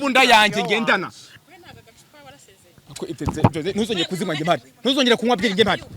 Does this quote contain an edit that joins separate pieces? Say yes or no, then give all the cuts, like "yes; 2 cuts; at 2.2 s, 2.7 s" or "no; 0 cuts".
yes; 1 cut; at 1.2 s